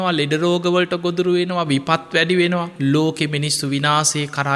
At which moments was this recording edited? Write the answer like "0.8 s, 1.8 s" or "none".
2.7 s